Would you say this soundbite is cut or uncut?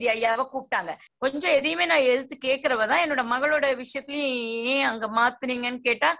cut